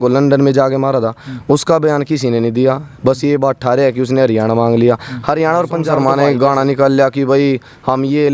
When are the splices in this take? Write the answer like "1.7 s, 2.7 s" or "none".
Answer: 5.9 s

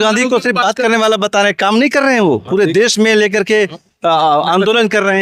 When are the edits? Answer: none

